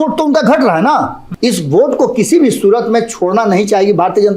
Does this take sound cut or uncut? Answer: cut